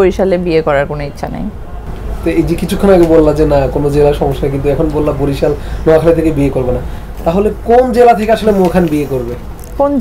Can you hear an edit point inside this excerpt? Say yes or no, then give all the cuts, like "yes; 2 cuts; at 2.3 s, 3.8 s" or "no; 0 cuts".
no; 0 cuts